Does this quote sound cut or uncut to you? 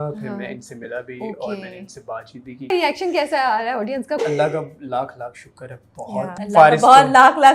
cut